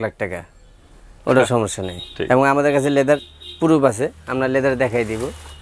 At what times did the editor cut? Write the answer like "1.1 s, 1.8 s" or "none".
none

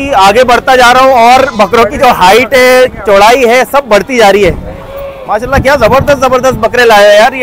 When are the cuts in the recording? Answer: none

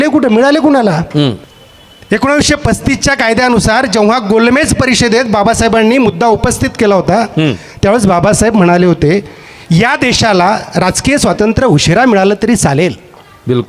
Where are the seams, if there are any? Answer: 1.5 s

